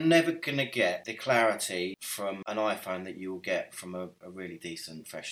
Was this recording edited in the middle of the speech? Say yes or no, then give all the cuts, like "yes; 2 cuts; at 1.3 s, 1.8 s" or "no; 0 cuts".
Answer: yes; 1 cut; at 4.3 s